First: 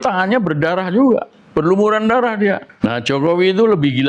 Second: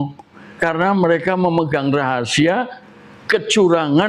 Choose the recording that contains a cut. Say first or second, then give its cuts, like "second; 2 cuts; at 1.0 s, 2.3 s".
first; 1 cut; at 2.7 s